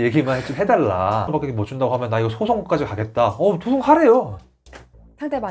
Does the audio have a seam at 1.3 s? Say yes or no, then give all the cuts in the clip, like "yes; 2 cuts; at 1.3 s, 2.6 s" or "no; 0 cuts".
yes; 1 cut; at 1.3 s